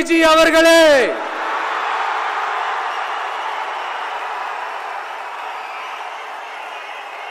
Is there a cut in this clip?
no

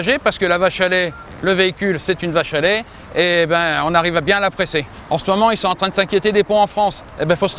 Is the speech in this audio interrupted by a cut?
yes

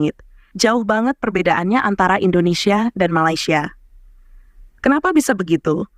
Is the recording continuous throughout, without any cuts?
yes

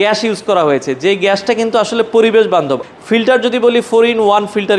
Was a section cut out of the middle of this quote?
yes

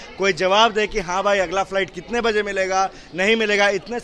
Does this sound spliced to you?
no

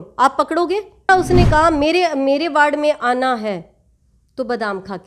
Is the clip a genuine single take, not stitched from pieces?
no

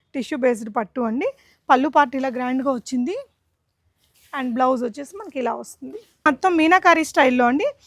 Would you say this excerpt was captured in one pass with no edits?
no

